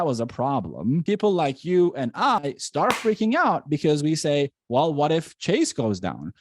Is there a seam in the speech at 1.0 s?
yes; 1 cut; at 1.0 s

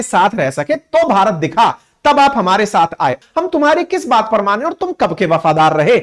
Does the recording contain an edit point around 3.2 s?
yes; 1 cut; at 3.2 s

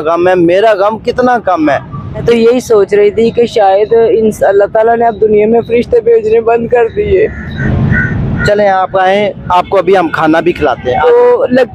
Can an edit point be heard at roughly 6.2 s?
no; 2 cuts; at 2.2 s, 7.6 s

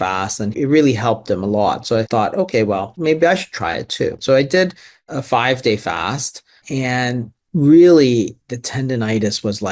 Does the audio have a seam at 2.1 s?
yes; 3 cuts; at 2.1 s, 4.2 s, 7.4 s

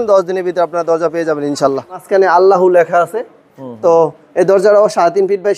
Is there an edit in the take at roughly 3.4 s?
no; 1 cut; at 2.0 s

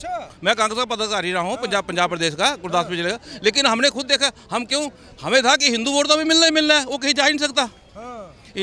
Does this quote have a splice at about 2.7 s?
no; 0 cuts

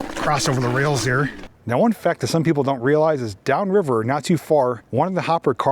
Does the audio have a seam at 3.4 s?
no; 2 cuts; at 1.4 s, 4.8 s

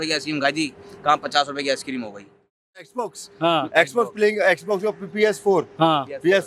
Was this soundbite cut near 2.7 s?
yes; 1 cut; at 2.7 s

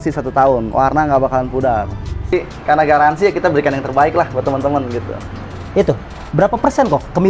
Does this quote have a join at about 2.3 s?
yes; 1 cut; at 2.3 s

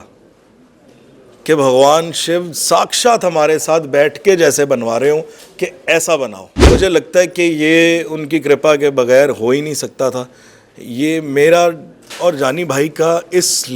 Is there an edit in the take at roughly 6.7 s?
yes; 1 cut; at 6.7 s

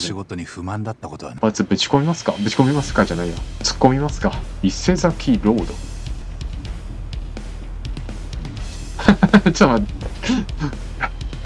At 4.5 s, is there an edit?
yes; 3 cuts; at 1.3 s, 4.5 s, 6.2 s

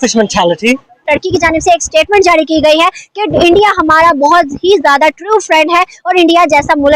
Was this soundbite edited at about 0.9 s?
yes; 1 cut; at 0.9 s

